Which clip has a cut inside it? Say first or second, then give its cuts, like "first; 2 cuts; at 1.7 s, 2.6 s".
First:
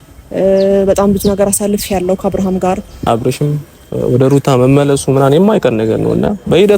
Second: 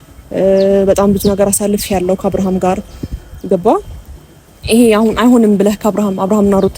first; 1 cut; at 3.0 s